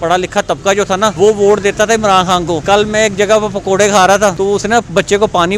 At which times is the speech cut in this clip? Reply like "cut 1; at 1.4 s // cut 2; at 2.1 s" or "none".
cut 1; at 1.1 s // cut 2; at 2.6 s // cut 3; at 4.4 s